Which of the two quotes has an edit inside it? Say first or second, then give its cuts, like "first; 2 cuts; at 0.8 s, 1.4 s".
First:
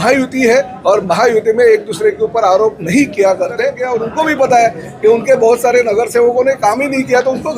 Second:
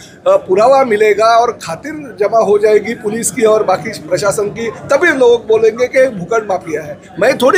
first; 1 cut; at 3.9 s